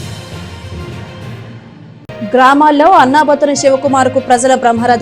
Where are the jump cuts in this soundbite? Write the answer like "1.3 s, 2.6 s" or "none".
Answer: 1.6 s